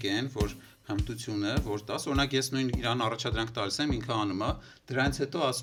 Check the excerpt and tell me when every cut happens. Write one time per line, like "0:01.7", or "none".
none